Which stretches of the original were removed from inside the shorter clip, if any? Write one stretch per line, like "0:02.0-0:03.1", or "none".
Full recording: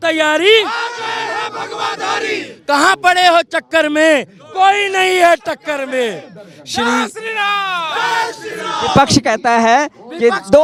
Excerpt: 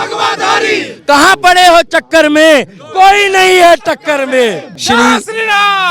0:06.3-0:06.6